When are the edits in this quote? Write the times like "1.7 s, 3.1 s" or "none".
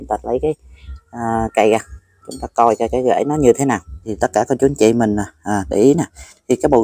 4.1 s